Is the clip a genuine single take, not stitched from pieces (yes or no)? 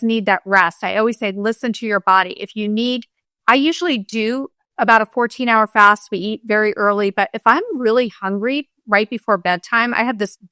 no